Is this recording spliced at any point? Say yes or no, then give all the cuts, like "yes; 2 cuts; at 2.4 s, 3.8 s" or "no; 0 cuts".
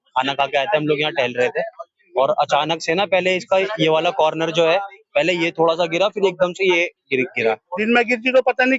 yes; 1 cut; at 7.7 s